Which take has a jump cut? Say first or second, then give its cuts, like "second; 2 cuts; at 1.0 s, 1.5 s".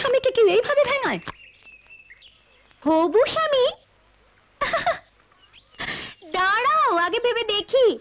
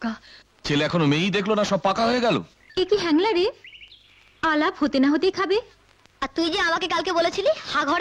second; 1 cut; at 2.6 s